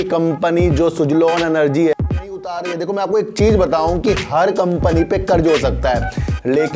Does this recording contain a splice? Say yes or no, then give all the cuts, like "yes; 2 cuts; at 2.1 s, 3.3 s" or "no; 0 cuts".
yes; 1 cut; at 2.2 s